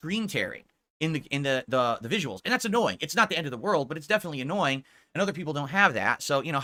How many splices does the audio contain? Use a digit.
0